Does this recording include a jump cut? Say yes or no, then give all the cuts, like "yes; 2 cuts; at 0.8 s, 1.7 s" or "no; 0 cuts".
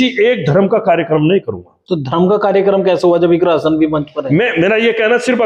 no; 0 cuts